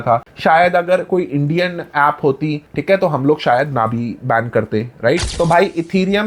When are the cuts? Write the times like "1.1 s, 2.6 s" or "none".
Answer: 5.3 s